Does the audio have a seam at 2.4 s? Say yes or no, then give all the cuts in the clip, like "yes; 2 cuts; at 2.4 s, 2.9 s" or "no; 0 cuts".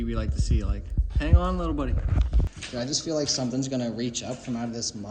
yes; 1 cut; at 2.4 s